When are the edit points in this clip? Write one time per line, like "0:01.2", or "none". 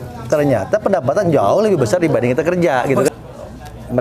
0:03.1

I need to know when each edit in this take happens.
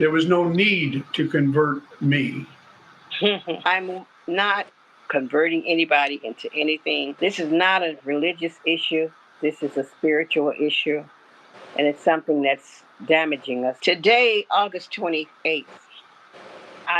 0:03.6
0:13.8

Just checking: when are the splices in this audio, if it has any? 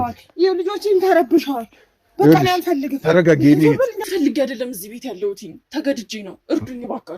0:04.0

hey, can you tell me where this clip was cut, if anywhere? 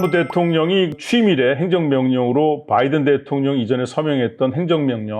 0:00.9

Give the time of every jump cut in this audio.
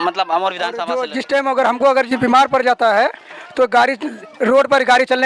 0:01.0

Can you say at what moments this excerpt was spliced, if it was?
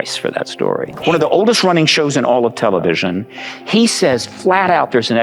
0:01.0

